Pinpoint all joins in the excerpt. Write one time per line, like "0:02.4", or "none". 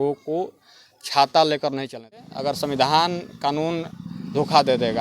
0:02.3